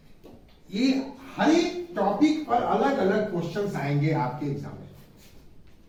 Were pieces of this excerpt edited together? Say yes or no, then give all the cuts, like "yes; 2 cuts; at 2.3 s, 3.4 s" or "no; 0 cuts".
no; 0 cuts